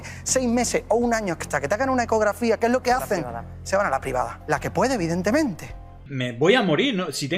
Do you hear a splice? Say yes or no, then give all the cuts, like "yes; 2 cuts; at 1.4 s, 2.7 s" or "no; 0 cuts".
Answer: yes; 1 cut; at 6.2 s